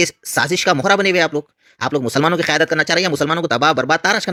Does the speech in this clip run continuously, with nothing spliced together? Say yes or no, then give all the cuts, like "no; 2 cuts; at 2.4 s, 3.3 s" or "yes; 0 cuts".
yes; 0 cuts